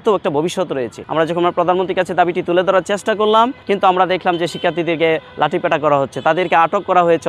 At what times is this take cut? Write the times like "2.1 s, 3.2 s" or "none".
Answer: 0.9 s, 3.6 s